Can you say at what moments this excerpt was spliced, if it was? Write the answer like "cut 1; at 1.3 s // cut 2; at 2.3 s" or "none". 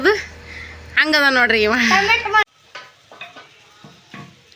cut 1; at 2.4 s